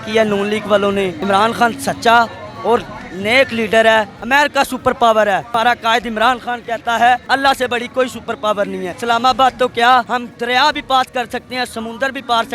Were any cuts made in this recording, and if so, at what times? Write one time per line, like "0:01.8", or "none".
0:01.2
0:04.2
0:09.0